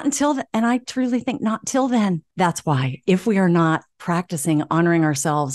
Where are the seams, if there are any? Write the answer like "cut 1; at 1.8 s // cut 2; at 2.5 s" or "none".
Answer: cut 1; at 2.3 s